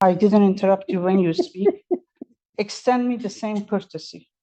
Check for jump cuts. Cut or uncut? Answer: uncut